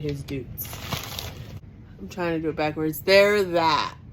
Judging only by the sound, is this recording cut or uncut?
cut